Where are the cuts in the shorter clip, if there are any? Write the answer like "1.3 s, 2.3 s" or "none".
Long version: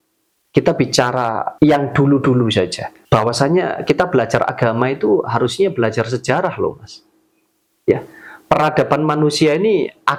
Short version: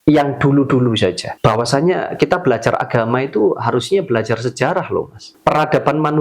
1.3 s, 5.2 s